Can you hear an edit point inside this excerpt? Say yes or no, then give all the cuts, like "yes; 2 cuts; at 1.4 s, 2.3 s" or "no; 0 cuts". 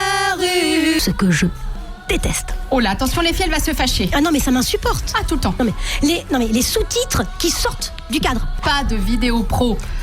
yes; 2 cuts; at 1.0 s, 8.6 s